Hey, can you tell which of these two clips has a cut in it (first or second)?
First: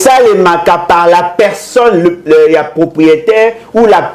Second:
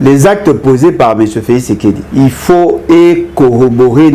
second